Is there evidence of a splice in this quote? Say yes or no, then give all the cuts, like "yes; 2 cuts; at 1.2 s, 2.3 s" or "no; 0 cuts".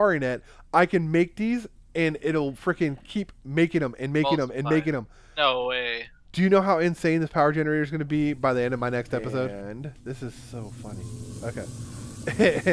yes; 1 cut; at 9.5 s